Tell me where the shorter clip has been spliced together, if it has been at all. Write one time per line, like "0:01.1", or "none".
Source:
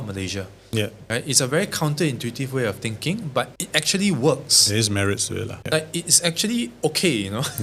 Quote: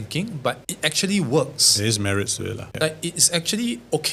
none